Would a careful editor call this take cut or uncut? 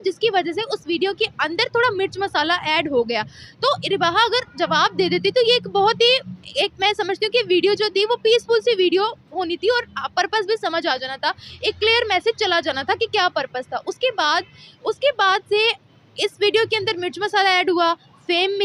uncut